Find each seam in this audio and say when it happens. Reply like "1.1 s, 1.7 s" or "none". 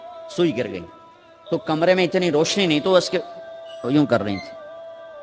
none